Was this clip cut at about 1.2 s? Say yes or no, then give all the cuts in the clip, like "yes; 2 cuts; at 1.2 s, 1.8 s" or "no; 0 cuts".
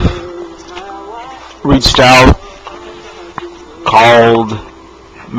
no; 1 cut; at 2.9 s